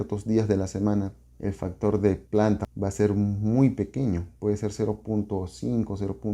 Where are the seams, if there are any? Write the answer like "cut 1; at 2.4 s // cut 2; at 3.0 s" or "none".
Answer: cut 1; at 1.2 s // cut 2; at 2.3 s // cut 3; at 4.3 s